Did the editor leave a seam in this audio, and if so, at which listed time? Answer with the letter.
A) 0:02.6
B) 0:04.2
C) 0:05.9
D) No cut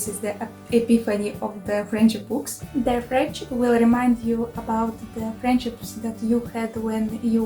A